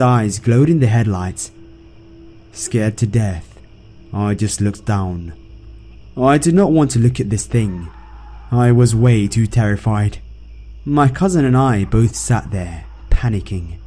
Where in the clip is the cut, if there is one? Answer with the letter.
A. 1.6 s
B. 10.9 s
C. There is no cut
C